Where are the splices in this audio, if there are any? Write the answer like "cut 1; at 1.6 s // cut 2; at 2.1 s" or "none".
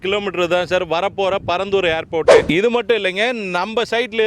cut 1; at 2.4 s